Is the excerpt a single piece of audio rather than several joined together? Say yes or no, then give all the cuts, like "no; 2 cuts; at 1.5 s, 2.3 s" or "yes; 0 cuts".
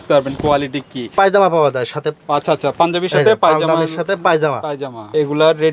no; 1 cut; at 1.1 s